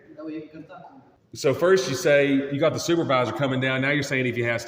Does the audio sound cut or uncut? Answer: cut